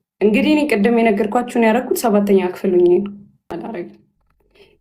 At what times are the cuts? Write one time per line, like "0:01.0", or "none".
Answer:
0:03.5